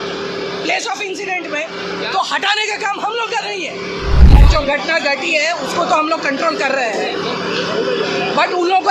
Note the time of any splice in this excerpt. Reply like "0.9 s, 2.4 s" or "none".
4.4 s